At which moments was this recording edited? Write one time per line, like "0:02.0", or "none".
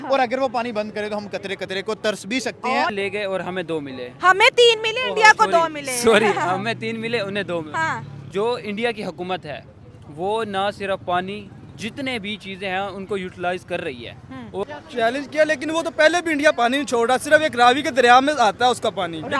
0:02.9
0:08.1
0:14.6